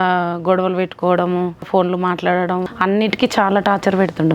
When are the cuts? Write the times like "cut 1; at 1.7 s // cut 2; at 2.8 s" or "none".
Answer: cut 1; at 1.7 s // cut 2; at 2.7 s